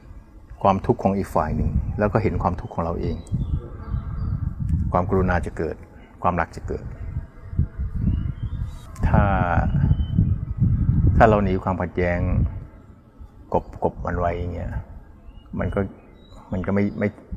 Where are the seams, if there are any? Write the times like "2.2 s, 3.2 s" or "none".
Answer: 8.8 s